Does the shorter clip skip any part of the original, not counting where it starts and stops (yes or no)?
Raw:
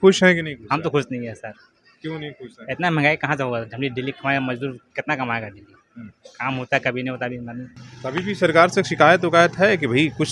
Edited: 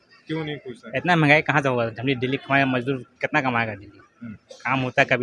no